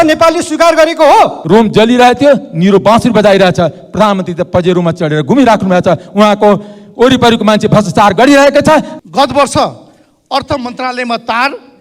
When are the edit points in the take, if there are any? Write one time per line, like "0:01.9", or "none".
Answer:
0:01.4
0:08.9